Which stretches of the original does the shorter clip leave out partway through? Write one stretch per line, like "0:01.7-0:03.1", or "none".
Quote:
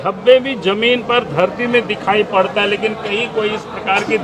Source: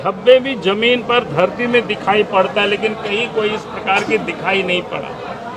none